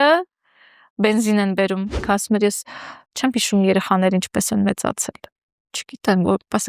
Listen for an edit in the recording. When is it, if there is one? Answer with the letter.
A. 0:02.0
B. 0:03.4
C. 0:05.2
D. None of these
A